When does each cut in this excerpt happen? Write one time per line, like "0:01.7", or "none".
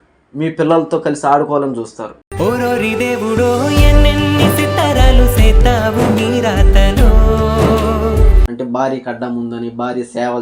0:08.4